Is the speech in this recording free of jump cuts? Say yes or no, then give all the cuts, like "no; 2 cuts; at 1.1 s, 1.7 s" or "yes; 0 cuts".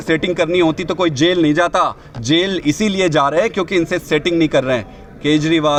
yes; 0 cuts